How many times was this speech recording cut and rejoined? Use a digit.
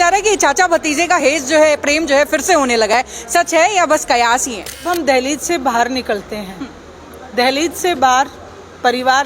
1